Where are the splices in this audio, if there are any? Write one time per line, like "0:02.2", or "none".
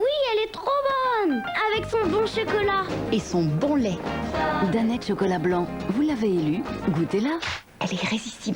none